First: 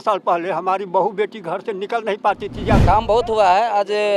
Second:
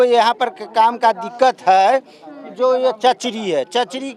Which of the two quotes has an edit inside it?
first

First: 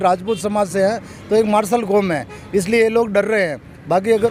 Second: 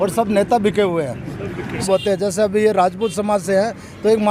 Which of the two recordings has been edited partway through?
second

